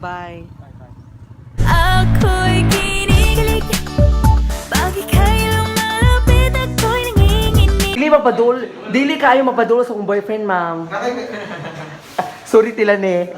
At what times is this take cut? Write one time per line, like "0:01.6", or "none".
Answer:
0:01.3
0:08.0